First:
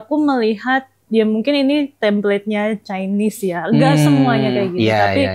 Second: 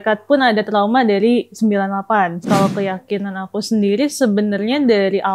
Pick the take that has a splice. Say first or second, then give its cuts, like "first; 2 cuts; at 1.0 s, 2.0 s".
second; 1 cut; at 2.4 s